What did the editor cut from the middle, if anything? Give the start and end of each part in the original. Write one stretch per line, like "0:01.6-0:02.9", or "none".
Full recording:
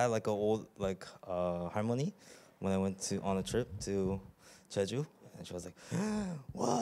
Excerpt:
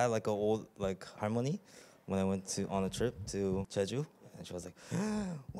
0:01.1-0:01.7
0:04.2-0:04.7